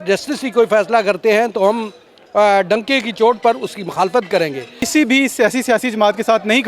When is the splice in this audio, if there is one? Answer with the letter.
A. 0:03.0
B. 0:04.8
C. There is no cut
B